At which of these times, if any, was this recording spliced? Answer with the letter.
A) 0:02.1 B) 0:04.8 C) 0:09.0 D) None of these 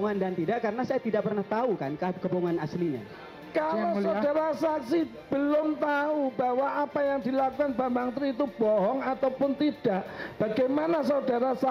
D